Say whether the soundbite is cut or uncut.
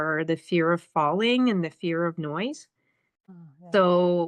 cut